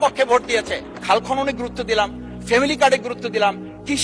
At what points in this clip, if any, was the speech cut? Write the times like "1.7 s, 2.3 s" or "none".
1.0 s

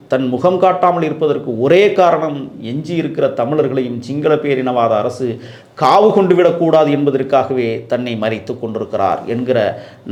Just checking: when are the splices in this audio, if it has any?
none

